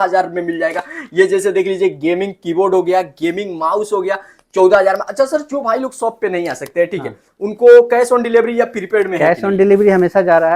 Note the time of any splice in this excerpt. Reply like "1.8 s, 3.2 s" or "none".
none